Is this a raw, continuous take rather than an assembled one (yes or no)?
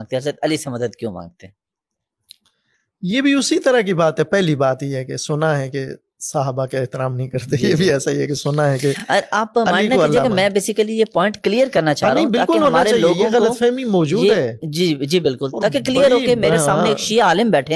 yes